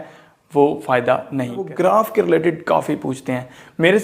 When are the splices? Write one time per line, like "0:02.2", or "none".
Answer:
0:01.6